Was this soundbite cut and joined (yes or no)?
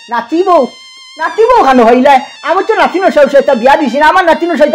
no